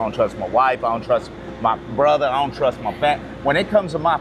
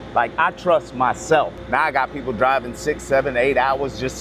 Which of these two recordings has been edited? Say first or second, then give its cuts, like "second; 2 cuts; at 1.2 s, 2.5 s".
second; 1 cut; at 1.6 s